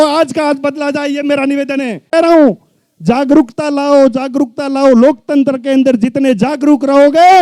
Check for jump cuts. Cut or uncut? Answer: cut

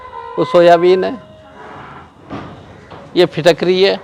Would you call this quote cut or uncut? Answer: uncut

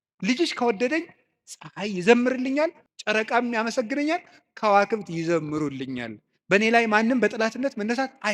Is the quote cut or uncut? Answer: cut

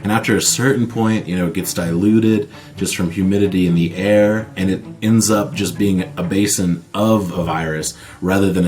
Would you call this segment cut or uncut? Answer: uncut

